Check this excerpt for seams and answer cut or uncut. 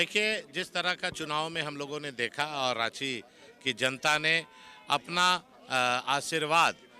uncut